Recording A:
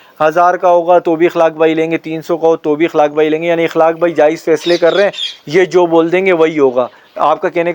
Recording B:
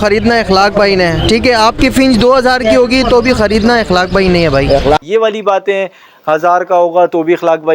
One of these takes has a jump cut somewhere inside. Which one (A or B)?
B